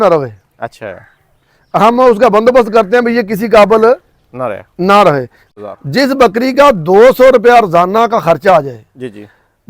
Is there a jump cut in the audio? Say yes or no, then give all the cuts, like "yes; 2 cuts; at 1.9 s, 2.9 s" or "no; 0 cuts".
yes; 1 cut; at 5.4 s